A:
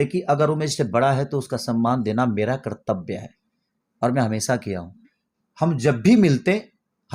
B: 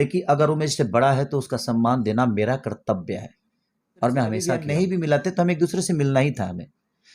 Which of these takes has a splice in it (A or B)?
B